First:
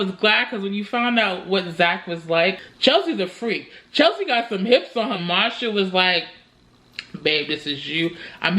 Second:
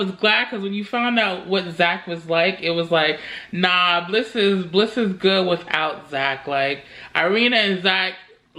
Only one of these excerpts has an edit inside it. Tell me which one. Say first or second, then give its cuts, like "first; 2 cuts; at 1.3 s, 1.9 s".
first; 2 cuts; at 2.6 s, 5.2 s